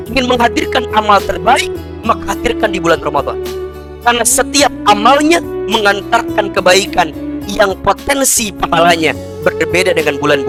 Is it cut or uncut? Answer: uncut